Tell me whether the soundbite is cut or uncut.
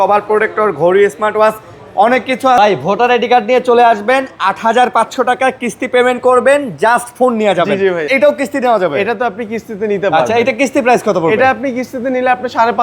cut